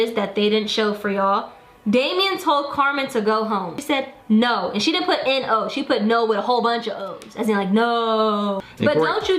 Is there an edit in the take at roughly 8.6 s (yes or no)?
yes